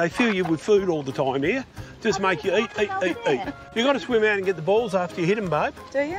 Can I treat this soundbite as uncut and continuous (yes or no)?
no